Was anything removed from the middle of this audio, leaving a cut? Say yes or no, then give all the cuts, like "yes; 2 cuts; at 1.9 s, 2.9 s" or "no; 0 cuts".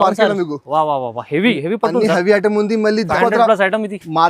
yes; 1 cut; at 3.1 s